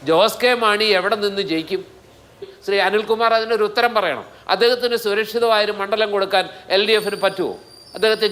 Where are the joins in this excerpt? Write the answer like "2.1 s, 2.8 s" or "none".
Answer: 2.5 s